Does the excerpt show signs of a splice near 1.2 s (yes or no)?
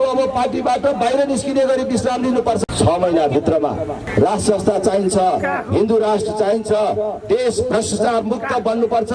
no